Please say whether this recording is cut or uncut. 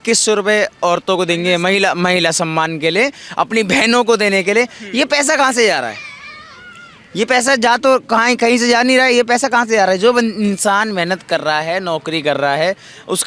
uncut